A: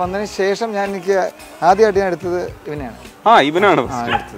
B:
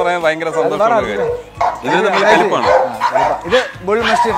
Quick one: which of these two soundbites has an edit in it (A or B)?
B